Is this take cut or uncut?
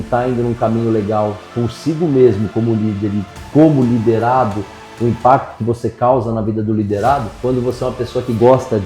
cut